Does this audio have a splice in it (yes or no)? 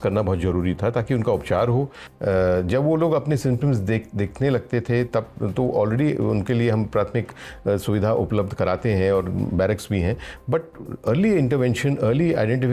yes